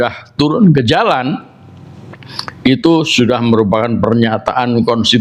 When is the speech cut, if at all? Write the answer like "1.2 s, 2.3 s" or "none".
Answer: none